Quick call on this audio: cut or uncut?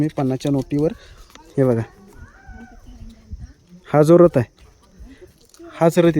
uncut